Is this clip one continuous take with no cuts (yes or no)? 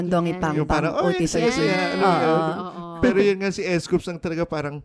yes